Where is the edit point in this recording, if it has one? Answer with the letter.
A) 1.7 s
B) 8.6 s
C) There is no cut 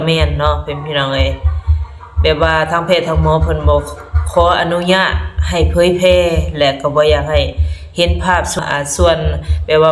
B